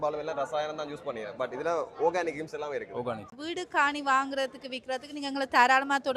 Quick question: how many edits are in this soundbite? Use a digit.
1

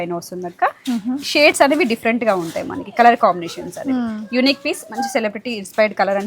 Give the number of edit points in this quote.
0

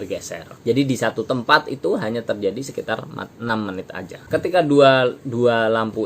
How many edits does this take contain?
1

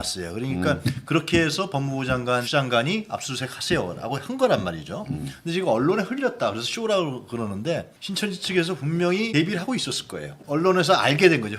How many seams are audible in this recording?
3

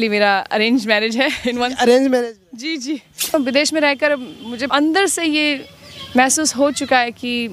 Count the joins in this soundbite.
2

